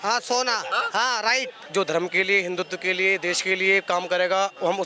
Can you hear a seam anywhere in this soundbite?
yes; 1 cut; at 1.6 s

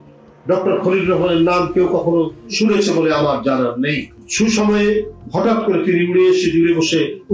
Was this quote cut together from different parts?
no; 0 cuts

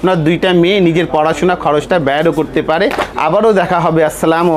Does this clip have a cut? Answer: no; 0 cuts

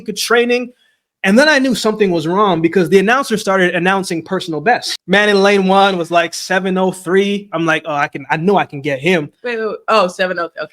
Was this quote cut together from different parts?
yes; 1 cut; at 4.9 s

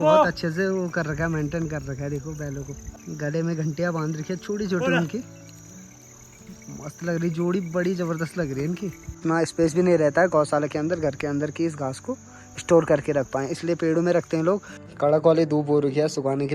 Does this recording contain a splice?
yes; 3 cuts; at 2.9 s, 9.1 s, 14.8 s

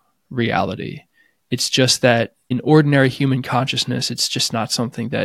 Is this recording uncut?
no; 1 cut; at 2.5 s

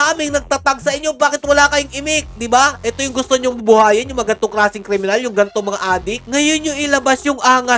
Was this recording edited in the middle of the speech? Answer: no; 0 cuts

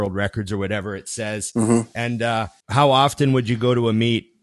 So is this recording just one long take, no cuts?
no; 1 cut; at 2.6 s

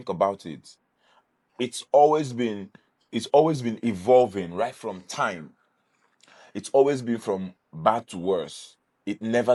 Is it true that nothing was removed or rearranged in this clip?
yes; 0 cuts

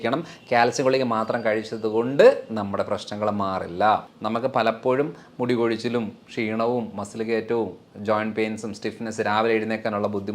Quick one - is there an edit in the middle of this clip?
yes; 1 cut; at 4.1 s

